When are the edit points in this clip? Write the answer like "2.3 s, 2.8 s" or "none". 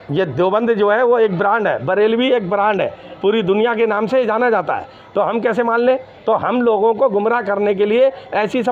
none